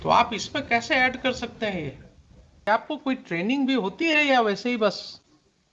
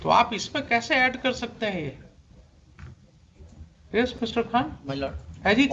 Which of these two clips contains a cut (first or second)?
first